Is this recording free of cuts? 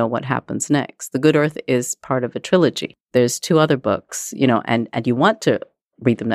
no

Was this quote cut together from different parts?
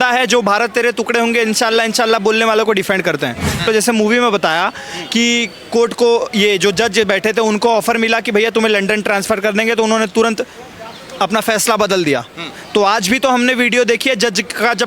yes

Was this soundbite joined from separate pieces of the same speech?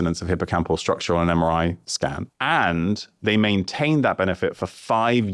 yes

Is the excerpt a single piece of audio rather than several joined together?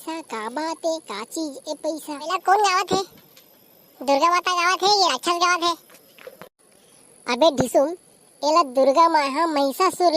no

